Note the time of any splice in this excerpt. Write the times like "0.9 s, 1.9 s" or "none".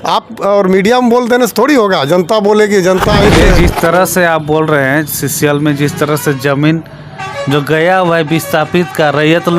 3.3 s